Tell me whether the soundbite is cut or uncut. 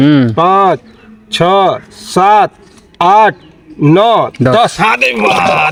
uncut